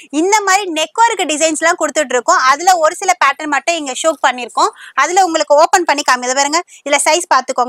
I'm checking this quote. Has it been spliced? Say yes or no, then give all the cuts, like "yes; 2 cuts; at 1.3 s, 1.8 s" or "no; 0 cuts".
no; 0 cuts